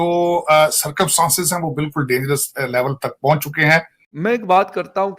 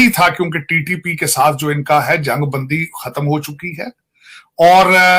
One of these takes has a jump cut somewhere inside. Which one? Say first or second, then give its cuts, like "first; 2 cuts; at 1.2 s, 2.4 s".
first; 1 cut; at 4.0 s